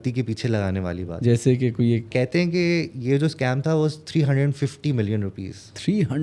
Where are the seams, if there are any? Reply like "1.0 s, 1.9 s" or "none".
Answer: 2.1 s

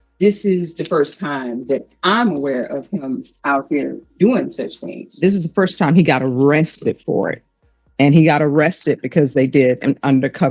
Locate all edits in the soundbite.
none

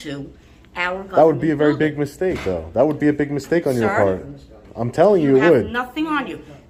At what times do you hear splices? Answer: none

